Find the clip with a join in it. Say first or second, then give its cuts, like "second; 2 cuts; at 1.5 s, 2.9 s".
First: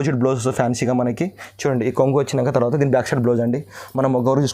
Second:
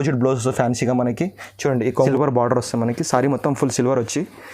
second; 1 cut; at 2.1 s